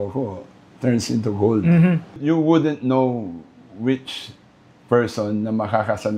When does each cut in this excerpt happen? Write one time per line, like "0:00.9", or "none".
0:02.2